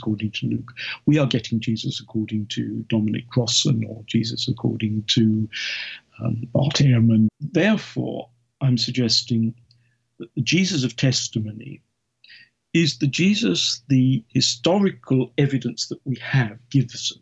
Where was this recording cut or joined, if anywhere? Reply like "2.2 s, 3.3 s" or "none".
7.3 s